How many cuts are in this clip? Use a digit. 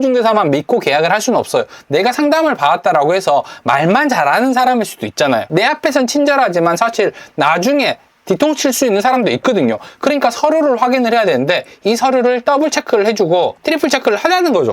1